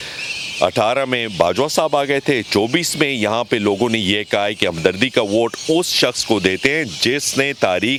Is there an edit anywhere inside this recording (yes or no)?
no